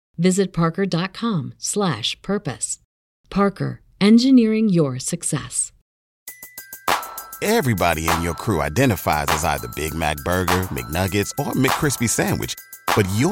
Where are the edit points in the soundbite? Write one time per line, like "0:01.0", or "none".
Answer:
0:06.1